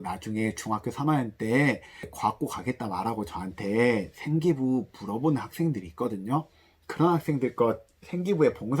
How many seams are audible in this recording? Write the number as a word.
one